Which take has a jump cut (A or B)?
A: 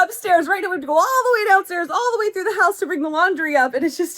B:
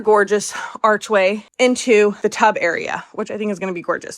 B